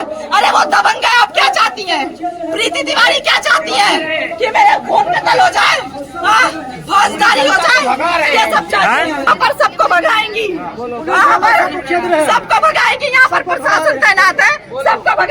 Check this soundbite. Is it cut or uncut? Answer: uncut